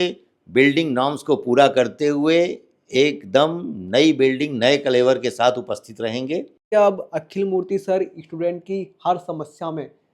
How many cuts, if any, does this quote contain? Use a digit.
1